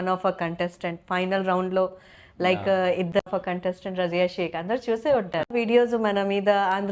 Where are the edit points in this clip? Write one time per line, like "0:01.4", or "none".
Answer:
0:03.2
0:05.5